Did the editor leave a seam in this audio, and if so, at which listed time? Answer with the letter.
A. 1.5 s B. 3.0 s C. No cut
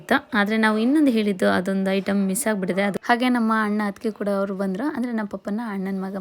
B